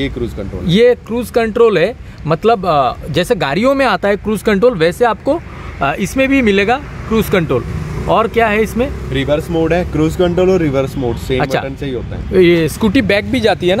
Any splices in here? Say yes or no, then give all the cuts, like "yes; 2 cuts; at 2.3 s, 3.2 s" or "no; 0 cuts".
no; 0 cuts